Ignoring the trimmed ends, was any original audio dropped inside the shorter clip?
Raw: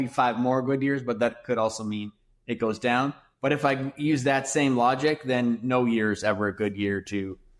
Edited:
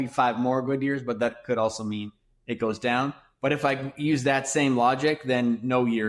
no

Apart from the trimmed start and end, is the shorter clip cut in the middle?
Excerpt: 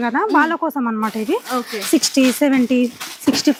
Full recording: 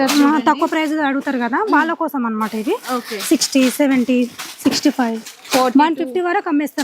no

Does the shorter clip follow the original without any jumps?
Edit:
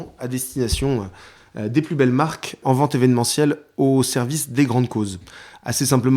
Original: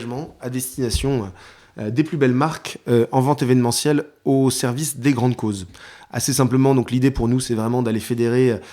no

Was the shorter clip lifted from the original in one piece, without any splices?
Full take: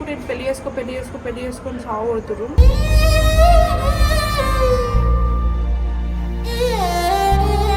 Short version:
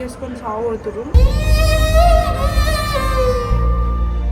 yes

